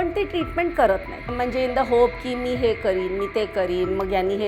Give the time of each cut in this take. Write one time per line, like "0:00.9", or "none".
0:01.3